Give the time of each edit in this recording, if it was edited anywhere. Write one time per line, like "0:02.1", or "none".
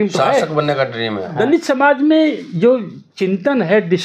0:01.3